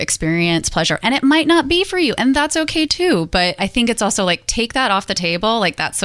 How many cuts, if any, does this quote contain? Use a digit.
0